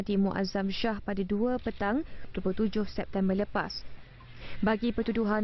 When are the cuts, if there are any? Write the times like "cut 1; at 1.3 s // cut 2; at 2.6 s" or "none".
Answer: cut 1; at 1.7 s

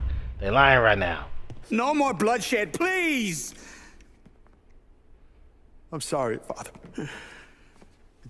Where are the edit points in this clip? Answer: cut 1; at 1.5 s

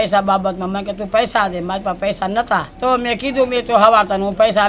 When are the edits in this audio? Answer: cut 1; at 2.7 s

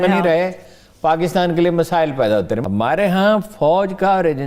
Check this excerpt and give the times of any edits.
cut 1; at 2.6 s

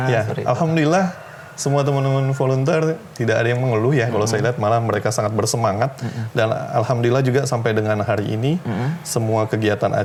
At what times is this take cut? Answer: none

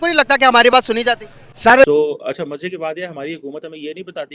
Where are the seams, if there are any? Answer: cut 1; at 1.8 s

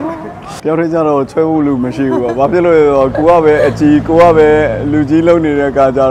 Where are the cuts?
none

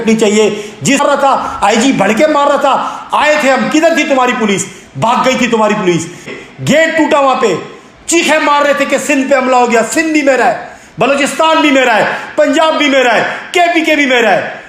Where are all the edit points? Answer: cut 1; at 1.0 s // cut 2; at 6.3 s

